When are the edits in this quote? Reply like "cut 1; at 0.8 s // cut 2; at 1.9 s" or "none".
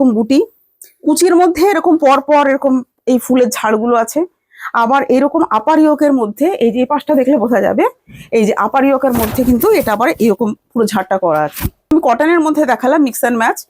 cut 1; at 11.9 s